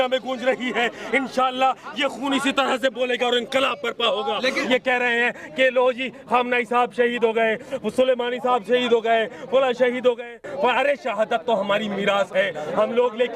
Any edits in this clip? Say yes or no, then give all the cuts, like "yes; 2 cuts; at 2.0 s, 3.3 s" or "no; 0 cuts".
yes; 1 cut; at 4.7 s